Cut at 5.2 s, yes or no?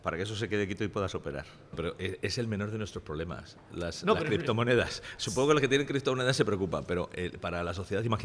no